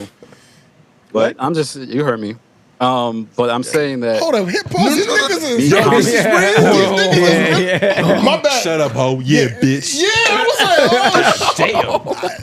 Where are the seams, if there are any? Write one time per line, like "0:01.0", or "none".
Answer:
none